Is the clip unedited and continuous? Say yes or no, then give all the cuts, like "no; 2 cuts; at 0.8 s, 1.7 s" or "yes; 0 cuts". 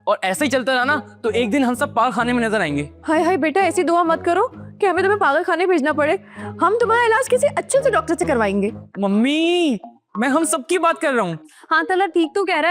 yes; 0 cuts